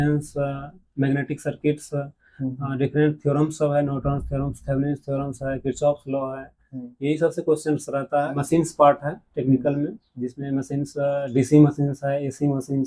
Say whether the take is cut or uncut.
cut